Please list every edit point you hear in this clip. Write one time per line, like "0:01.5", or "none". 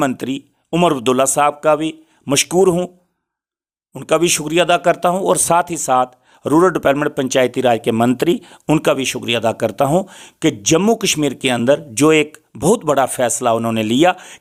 none